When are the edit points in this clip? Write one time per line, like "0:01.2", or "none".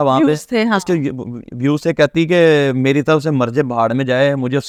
none

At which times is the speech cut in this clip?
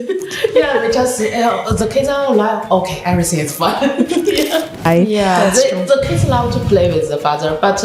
0:04.8

